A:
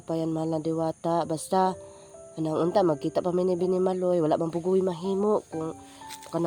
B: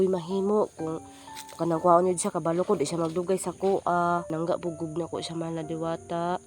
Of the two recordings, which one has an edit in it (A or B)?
B